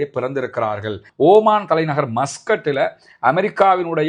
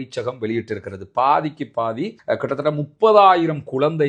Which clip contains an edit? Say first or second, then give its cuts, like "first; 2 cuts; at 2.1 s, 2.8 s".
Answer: first; 1 cut; at 1.0 s